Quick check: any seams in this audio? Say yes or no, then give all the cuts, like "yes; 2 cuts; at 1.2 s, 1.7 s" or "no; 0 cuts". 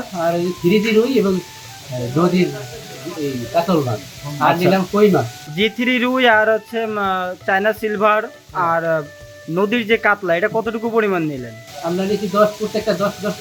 no; 0 cuts